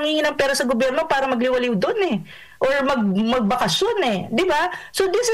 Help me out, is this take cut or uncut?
uncut